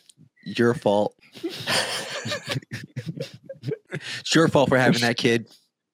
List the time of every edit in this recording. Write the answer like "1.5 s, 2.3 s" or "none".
1.6 s, 4.1 s